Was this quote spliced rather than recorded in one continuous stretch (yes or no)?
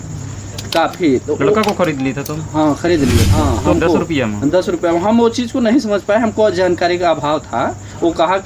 yes